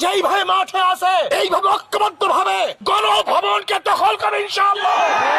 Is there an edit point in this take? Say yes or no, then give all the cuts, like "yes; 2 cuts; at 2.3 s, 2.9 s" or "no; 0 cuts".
yes; 2 cuts; at 1.3 s, 2.8 s